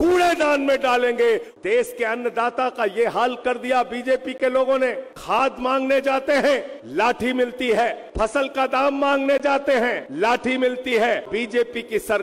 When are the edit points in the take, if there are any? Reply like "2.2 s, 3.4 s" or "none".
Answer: 1.5 s, 5.1 s, 6.8 s, 8.0 s, 10.0 s, 11.3 s